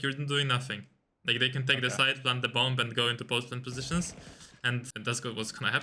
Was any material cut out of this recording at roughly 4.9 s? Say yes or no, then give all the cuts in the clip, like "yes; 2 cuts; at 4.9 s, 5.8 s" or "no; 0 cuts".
yes; 1 cut; at 4.9 s